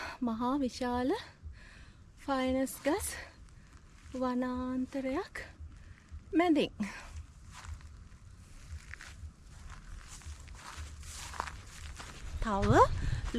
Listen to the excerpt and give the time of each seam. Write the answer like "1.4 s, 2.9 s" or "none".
12.3 s